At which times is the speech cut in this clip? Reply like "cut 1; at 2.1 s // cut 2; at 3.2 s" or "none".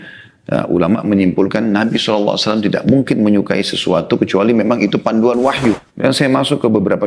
cut 1; at 5.9 s